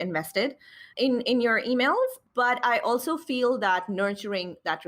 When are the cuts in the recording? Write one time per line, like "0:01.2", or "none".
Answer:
0:00.9
0:02.2